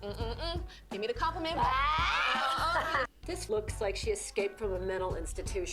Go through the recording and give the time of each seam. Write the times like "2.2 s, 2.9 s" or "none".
3.0 s